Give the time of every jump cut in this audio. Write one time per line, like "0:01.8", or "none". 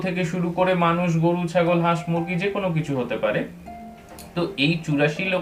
none